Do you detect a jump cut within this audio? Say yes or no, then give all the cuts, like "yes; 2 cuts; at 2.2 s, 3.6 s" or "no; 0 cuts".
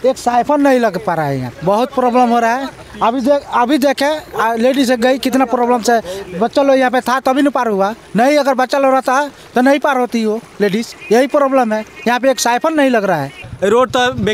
no; 0 cuts